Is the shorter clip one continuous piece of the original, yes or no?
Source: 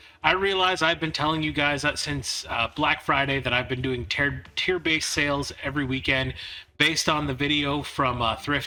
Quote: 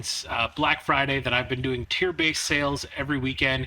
no